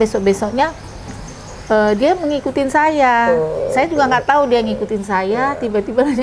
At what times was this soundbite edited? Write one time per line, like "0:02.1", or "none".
none